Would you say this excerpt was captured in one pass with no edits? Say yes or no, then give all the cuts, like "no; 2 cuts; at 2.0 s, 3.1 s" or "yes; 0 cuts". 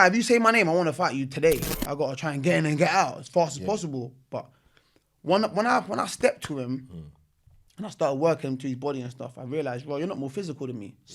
no; 1 cut; at 1.7 s